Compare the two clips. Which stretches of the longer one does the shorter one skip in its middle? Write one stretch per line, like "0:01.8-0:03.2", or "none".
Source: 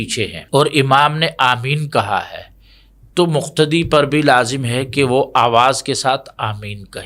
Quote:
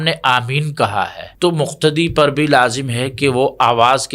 0:02.4-0:03.0